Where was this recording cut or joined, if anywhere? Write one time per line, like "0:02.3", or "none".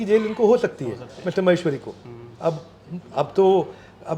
none

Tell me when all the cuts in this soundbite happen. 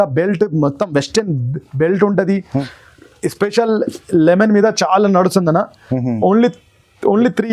0:02.6

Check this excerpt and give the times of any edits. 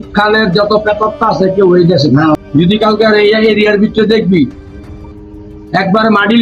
0:02.4

